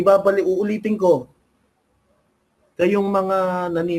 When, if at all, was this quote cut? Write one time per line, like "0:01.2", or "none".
none